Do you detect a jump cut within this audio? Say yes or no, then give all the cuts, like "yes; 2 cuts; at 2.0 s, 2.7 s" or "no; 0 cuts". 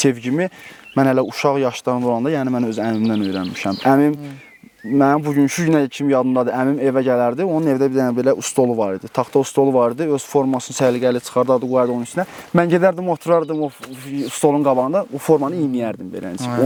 no; 0 cuts